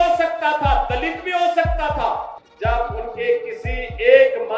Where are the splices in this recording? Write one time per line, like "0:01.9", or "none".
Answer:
0:02.4